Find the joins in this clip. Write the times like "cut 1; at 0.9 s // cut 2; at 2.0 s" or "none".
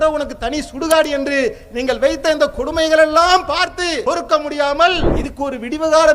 cut 1; at 4.0 s // cut 2; at 5.2 s